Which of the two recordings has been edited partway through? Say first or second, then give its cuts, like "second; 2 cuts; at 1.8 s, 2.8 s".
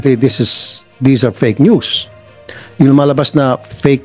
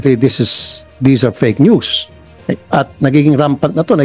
first; 1 cut; at 2.5 s